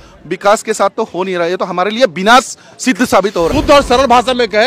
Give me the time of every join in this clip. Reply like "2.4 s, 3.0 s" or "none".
3.5 s